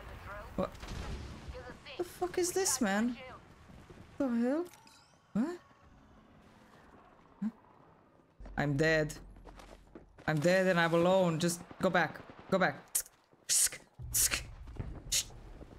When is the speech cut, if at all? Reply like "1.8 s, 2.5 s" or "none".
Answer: none